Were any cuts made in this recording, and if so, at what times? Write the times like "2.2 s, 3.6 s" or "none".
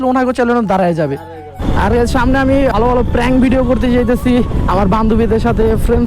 1.6 s, 2.7 s